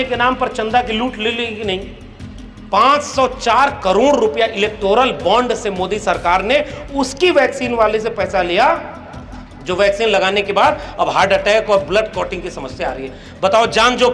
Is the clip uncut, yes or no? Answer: yes